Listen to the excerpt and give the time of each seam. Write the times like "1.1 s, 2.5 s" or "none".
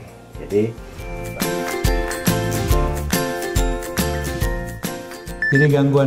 1.2 s